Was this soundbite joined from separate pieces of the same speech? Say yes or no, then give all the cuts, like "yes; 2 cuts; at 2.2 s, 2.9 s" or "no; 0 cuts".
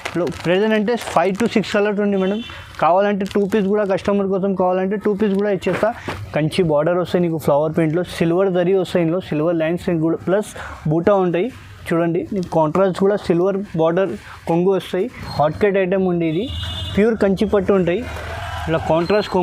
yes; 2 cuts; at 6.1 s, 15.2 s